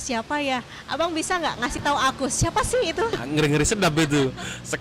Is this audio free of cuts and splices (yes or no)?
no